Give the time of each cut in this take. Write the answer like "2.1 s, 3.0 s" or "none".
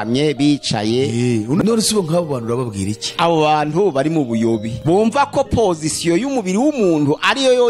1.6 s, 3.0 s, 4.7 s